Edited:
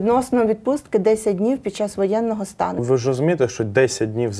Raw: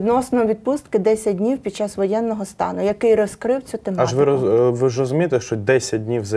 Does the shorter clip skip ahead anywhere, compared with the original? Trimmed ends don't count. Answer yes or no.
yes